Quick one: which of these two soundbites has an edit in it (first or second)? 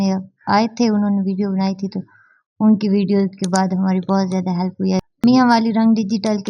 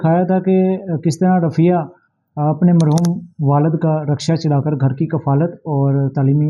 first